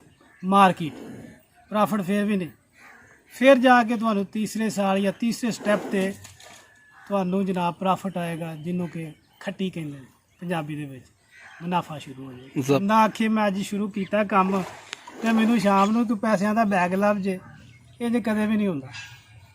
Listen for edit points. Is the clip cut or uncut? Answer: cut